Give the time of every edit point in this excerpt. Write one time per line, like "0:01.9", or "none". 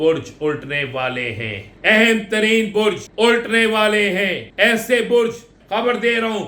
0:01.6
0:03.1
0:04.4
0:05.5